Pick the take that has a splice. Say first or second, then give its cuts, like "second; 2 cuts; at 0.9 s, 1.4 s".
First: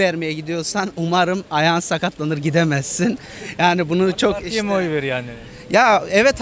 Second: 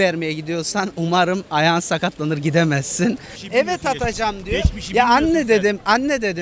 second; 1 cut; at 3.3 s